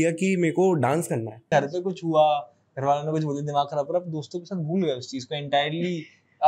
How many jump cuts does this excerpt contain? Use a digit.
1